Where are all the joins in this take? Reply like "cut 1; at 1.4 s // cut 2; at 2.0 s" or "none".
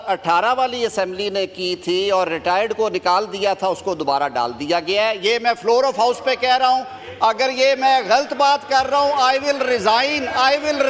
none